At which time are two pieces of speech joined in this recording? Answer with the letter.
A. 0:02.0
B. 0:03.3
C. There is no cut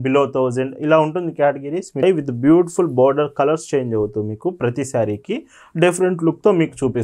A